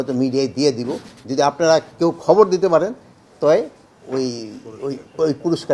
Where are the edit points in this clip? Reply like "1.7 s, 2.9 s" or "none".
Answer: none